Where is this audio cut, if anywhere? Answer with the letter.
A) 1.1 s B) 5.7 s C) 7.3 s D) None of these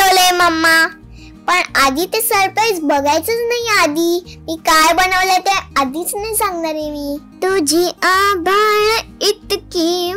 C